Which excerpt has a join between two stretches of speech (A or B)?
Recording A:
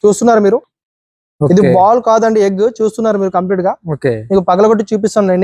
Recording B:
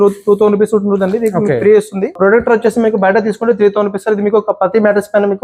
B